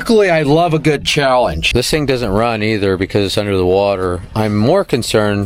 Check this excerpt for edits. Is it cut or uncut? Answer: cut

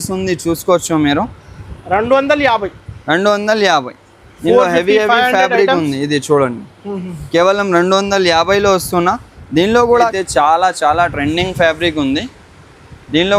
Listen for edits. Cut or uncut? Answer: cut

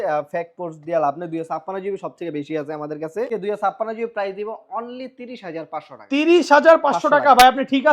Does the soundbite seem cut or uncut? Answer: cut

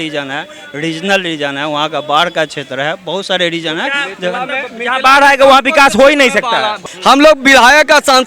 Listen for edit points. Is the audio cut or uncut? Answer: cut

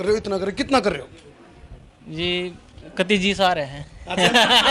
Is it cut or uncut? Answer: uncut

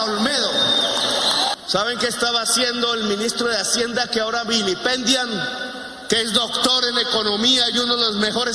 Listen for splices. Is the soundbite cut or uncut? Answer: cut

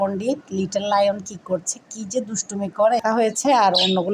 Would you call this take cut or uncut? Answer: cut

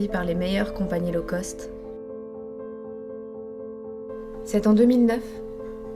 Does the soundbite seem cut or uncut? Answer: uncut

